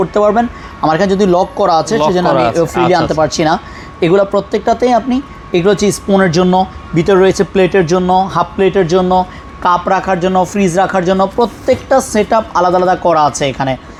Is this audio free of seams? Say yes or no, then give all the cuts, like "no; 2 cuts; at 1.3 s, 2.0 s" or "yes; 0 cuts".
yes; 0 cuts